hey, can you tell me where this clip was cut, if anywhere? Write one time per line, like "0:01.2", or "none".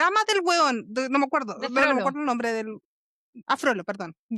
0:03.4